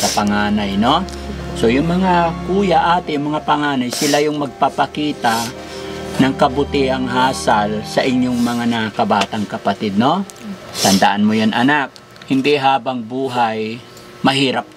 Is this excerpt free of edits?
yes; 0 cuts

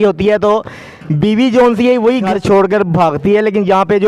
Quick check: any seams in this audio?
yes; 1 cut; at 2.3 s

